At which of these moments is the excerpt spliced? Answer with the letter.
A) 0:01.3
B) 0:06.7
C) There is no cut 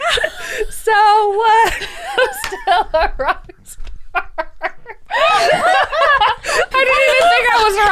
B